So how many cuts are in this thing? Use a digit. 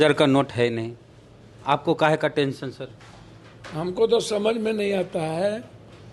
0